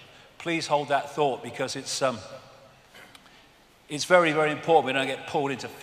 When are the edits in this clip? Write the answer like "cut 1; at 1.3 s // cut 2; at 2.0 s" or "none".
cut 1; at 2.1 s